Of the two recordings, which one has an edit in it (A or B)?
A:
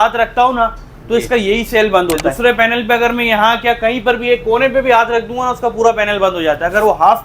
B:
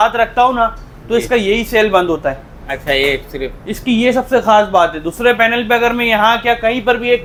A